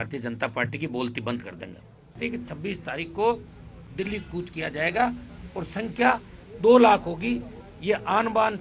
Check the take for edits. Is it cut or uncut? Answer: cut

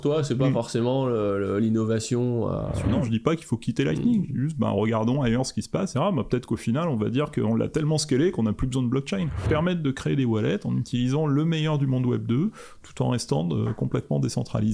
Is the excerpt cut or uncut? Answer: cut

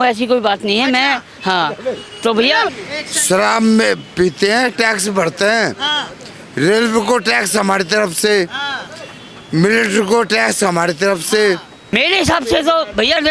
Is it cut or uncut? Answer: cut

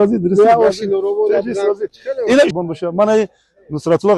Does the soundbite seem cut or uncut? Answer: cut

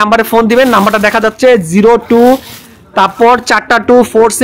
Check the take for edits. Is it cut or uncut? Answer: uncut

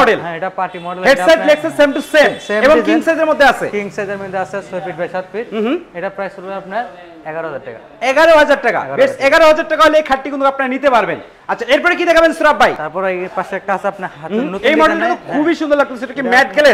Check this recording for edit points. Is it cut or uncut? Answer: uncut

